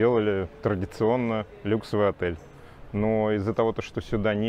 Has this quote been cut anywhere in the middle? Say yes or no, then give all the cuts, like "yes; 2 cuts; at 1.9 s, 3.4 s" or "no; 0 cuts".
no; 0 cuts